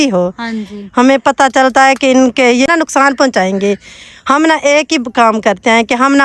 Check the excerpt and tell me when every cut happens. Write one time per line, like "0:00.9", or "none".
0:02.7